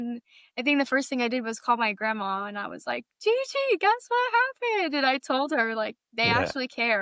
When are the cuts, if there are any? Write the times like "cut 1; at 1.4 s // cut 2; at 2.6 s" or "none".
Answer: none